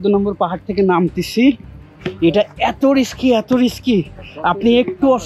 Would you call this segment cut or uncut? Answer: uncut